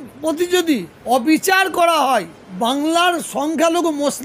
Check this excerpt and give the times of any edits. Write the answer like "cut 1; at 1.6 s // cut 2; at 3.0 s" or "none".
cut 1; at 0.9 s // cut 2; at 2.4 s